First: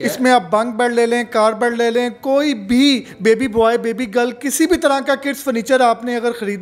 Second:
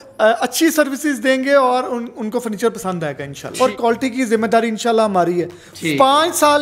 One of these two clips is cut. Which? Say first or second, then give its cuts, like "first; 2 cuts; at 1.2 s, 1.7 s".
second; 1 cut; at 3.5 s